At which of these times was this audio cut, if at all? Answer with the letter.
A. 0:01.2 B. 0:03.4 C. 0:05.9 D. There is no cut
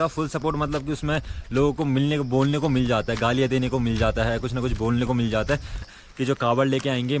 C